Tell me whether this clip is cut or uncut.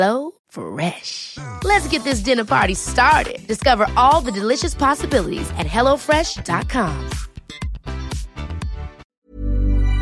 cut